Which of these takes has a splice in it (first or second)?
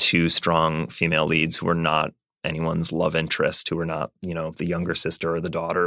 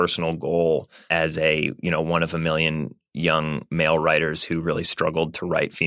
second